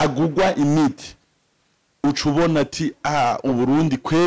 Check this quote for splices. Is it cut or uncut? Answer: uncut